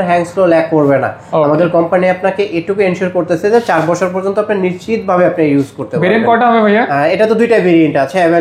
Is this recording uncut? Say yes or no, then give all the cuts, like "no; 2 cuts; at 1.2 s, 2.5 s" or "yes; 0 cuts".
yes; 0 cuts